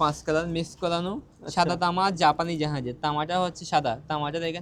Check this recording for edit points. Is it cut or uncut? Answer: uncut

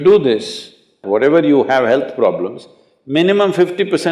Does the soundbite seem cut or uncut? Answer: cut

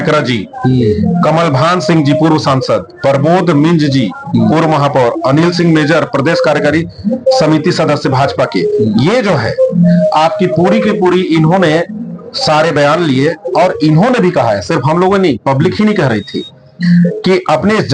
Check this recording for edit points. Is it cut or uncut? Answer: uncut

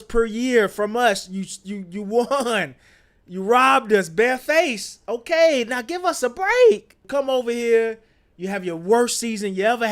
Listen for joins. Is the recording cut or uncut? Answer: cut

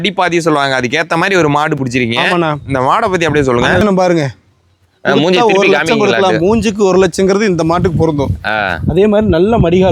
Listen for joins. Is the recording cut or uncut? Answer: cut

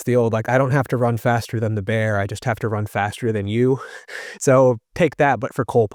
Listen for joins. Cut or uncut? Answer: uncut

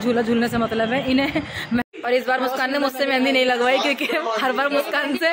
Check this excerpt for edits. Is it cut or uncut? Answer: cut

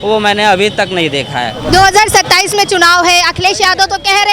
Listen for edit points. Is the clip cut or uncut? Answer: cut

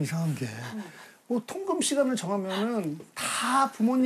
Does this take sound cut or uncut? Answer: uncut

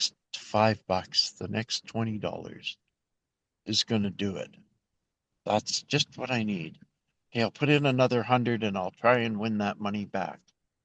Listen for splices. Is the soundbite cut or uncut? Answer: uncut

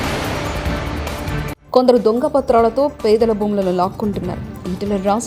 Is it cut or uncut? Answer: uncut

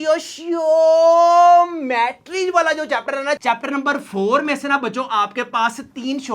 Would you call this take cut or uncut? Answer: cut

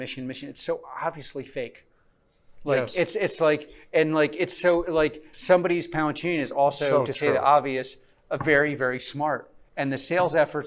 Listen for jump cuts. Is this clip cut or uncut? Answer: uncut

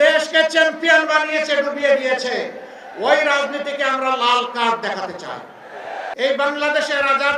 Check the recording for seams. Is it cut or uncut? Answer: cut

